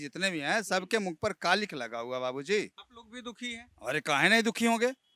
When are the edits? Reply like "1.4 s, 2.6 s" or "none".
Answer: none